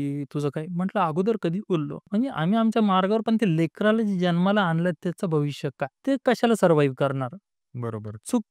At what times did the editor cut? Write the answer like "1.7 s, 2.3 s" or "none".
2.0 s